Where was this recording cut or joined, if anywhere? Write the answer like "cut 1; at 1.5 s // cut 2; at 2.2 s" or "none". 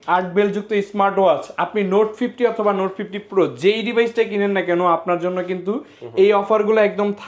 none